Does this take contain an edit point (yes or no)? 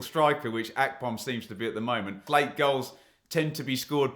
yes